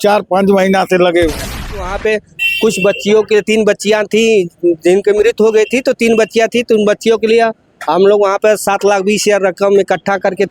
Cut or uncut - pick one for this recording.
cut